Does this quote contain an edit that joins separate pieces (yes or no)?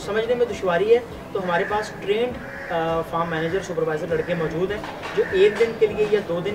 no